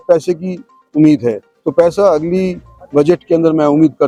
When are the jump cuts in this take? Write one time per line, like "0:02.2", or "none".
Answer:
none